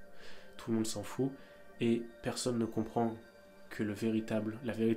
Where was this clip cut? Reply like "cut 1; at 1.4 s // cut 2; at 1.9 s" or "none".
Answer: none